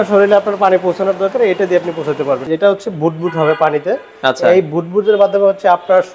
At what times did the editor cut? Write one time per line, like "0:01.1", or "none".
0:02.5